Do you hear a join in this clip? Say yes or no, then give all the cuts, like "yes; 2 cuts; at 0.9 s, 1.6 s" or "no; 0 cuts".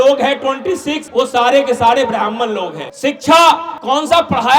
yes; 3 cuts; at 1.0 s, 2.8 s, 3.7 s